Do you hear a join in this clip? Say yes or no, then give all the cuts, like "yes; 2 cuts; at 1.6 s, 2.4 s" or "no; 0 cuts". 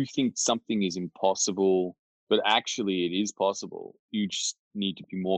no; 0 cuts